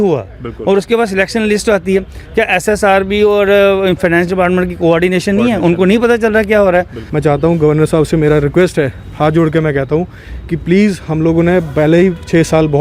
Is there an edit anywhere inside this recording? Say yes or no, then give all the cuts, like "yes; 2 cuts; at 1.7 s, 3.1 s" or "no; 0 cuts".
yes; 1 cut; at 7.0 s